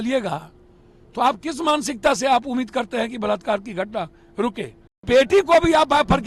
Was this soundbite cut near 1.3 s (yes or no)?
no